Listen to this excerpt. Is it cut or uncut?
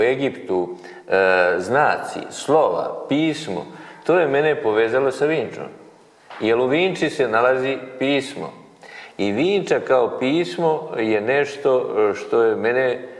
uncut